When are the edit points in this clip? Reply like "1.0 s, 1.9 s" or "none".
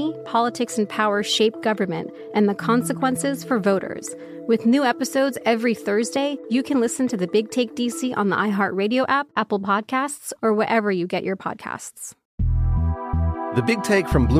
12.2 s